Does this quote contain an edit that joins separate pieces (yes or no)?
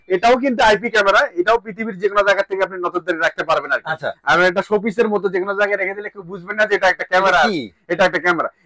no